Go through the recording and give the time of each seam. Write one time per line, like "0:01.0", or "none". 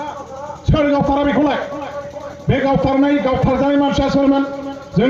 none